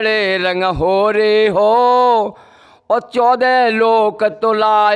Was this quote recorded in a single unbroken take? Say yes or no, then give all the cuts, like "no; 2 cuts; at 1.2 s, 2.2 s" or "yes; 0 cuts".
yes; 0 cuts